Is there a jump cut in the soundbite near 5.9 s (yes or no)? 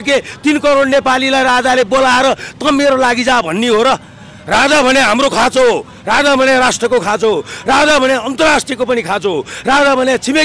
no